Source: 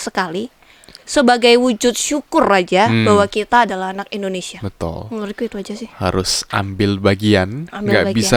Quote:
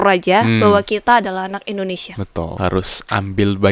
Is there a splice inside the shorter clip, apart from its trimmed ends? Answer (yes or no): yes